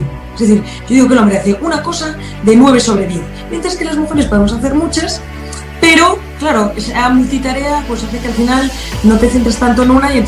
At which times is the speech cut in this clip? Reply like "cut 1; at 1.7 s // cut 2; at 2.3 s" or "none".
none